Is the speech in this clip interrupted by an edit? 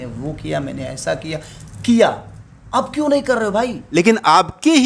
yes; 1 cut; at 4.0 s

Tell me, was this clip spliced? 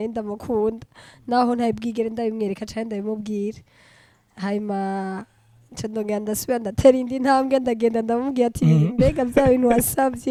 no; 0 cuts

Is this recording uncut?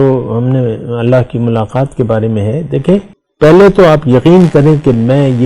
no; 1 cut; at 3.2 s

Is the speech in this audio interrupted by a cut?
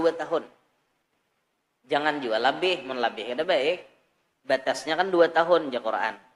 no; 0 cuts

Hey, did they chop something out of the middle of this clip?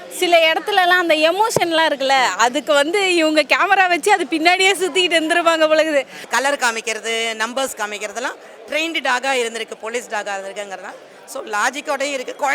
yes; 1 cut; at 6.3 s

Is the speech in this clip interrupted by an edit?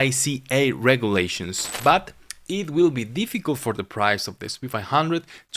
yes; 1 cut; at 1.6 s

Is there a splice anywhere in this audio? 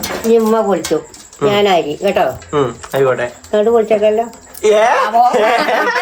no; 0 cuts

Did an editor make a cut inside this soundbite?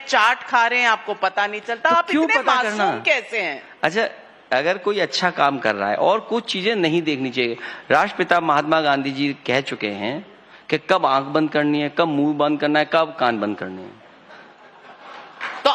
yes; 1 cut; at 4.8 s

